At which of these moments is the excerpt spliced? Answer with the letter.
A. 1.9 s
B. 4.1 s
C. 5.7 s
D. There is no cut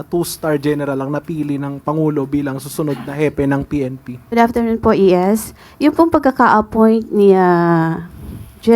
B